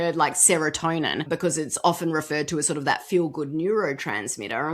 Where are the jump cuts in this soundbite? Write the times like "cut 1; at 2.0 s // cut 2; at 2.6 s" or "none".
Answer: cut 1; at 1.2 s